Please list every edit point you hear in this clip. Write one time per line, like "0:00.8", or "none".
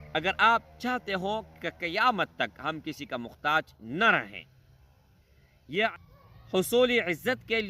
0:05.9

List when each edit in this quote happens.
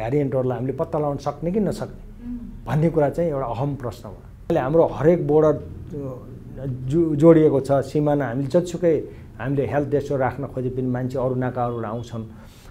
0:04.5

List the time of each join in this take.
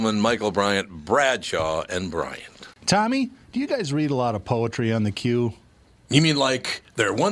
0:02.7

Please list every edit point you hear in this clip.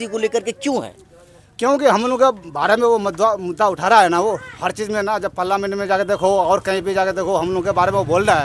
none

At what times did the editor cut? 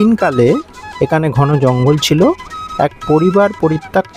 none

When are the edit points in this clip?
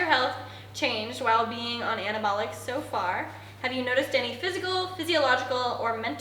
none

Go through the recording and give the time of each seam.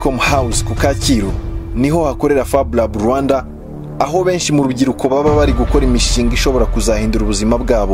0:05.3

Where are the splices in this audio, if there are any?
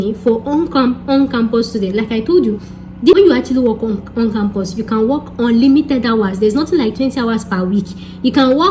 0:03.1

